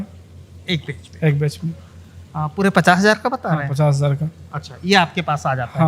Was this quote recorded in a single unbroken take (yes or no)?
yes